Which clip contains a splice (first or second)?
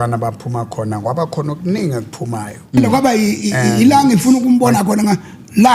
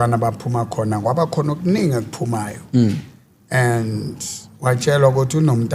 first